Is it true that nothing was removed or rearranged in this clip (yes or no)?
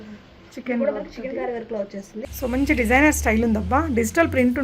no